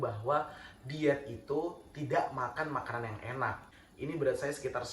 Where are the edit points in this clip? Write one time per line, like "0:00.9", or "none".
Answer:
0:03.7